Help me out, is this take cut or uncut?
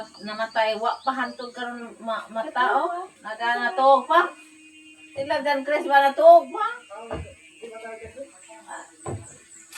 uncut